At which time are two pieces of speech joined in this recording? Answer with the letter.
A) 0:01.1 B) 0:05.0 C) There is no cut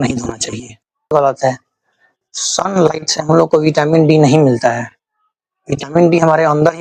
A